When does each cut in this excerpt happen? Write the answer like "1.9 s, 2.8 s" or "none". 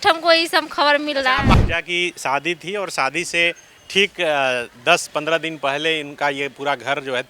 1.5 s